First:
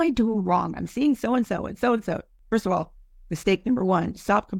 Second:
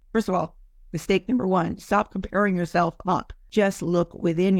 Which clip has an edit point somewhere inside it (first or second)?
second